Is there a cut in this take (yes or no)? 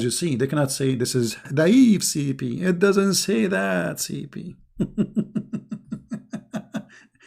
yes